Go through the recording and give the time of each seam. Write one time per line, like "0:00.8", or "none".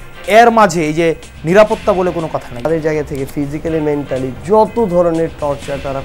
0:02.7